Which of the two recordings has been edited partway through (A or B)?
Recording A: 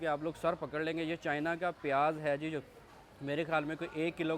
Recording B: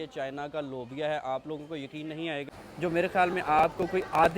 B